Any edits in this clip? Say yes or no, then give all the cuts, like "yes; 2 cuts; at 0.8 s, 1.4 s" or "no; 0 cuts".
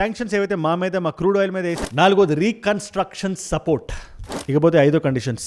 yes; 2 cuts; at 1.8 s, 4.3 s